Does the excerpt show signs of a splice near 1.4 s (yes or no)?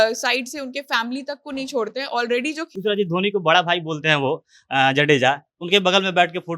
no